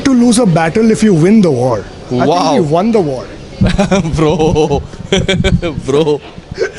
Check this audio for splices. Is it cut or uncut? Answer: uncut